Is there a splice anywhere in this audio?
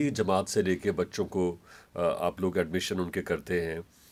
no; 0 cuts

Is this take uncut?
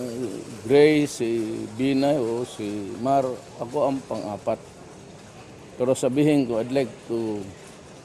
no; 1 cut; at 6.5 s

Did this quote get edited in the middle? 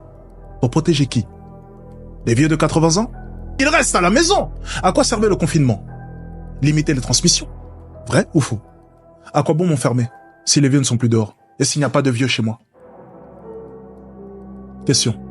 no; 0 cuts

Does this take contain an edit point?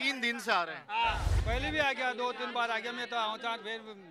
yes; 1 cut; at 1.3 s

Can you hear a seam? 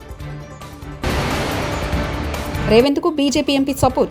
yes; 2 cuts; at 1.0 s, 2.6 s

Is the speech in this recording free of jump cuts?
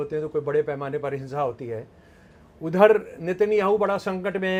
yes; 0 cuts

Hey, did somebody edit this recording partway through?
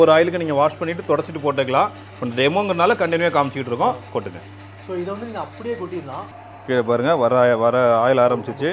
no; 0 cuts

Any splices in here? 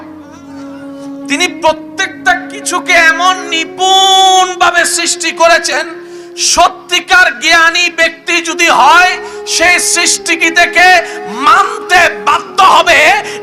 no; 0 cuts

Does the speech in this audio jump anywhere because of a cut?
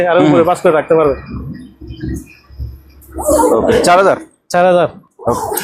no; 0 cuts

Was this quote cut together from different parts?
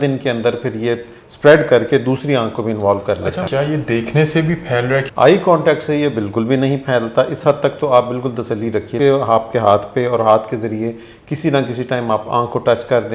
yes; 3 cuts; at 3.5 s, 5.1 s, 8.9 s

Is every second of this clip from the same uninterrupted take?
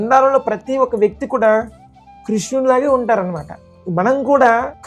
yes; 0 cuts

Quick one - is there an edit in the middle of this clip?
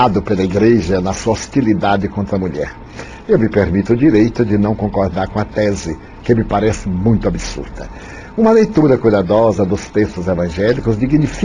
no; 0 cuts

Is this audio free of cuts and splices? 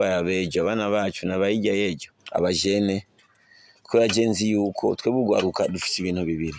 no; 1 cut; at 2.1 s

